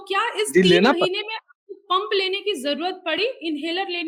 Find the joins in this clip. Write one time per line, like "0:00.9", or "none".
none